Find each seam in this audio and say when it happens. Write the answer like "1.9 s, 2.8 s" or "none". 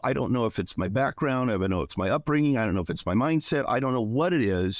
none